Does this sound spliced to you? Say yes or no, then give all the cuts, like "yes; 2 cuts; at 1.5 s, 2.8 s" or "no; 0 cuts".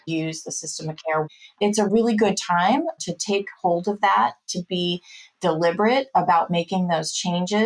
yes; 1 cut; at 1.3 s